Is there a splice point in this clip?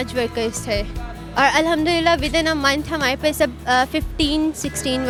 no; 0 cuts

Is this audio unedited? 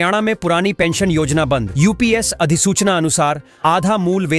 yes; 0 cuts

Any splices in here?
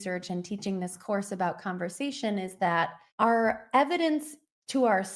yes; 1 cut; at 3.0 s

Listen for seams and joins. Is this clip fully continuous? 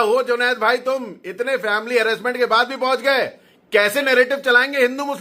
yes; 0 cuts

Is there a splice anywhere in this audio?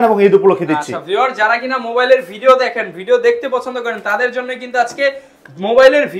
no; 0 cuts

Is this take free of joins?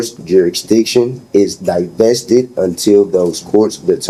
yes; 0 cuts

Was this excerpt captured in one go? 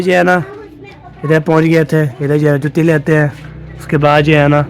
yes; 0 cuts

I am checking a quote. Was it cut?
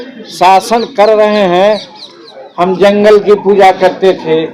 yes; 1 cut; at 1.9 s

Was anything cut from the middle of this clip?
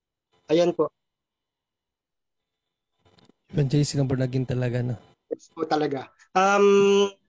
no; 0 cuts

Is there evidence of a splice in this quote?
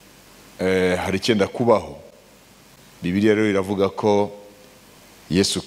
no; 0 cuts

